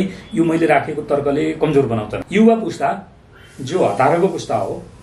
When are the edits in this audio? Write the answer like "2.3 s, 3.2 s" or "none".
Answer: 2.2 s